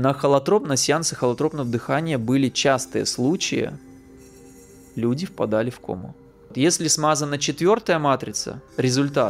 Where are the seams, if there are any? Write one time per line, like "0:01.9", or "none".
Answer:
0:06.5